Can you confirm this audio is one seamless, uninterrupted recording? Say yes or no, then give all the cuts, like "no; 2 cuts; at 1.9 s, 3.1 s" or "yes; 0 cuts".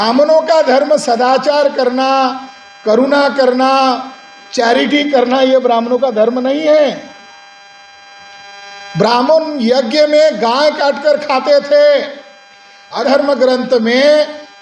no; 1 cut; at 13.0 s